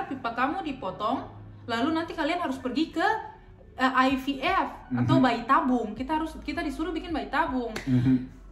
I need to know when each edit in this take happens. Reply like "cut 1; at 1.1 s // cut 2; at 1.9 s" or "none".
none